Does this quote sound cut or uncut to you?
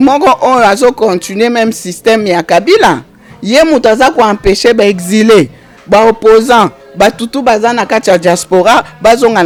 uncut